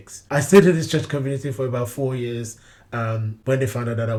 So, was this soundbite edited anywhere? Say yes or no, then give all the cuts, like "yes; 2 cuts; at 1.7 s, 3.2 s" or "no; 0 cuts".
no; 0 cuts